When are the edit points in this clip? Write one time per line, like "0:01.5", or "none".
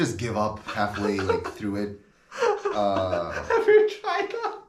none